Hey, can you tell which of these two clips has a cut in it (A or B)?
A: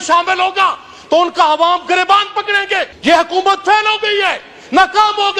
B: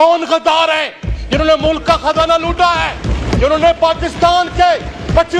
A